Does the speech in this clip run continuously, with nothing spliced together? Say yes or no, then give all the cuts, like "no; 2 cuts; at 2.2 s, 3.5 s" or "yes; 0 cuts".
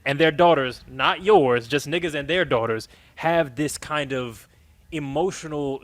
yes; 0 cuts